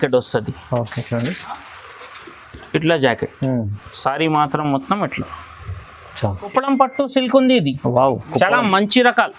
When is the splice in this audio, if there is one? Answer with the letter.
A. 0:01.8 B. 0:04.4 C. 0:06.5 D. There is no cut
C